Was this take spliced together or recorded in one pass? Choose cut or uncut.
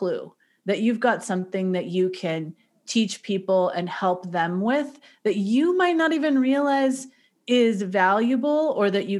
uncut